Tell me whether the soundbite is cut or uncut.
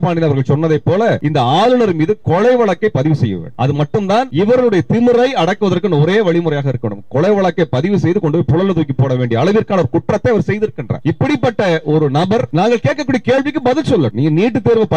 cut